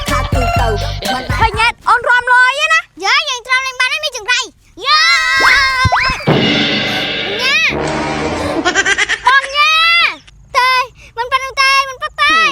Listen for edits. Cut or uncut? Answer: uncut